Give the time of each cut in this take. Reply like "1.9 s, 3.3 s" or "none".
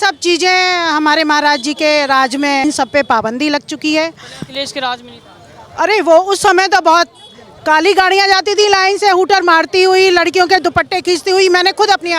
none